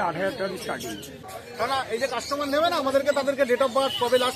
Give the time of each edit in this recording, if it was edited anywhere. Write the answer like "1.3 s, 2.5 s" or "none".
1.2 s